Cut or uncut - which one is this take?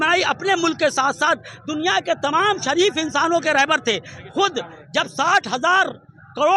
uncut